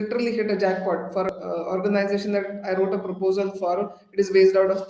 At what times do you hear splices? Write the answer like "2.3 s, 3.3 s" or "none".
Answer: 1.3 s